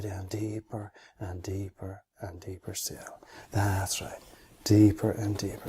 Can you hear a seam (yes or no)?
yes